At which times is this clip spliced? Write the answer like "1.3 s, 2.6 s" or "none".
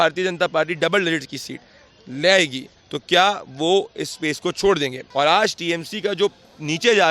5.0 s